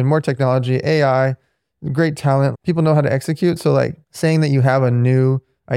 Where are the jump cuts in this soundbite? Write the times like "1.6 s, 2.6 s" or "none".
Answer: 2.5 s, 4.0 s